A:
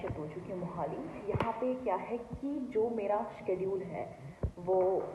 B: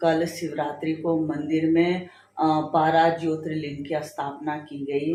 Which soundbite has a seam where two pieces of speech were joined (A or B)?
A